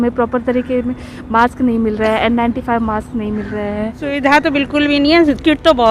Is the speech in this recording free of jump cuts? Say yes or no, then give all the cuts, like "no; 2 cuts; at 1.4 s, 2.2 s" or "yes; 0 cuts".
no; 1 cut; at 4.0 s